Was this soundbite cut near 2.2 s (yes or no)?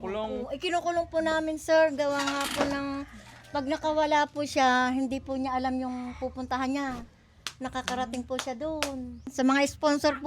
no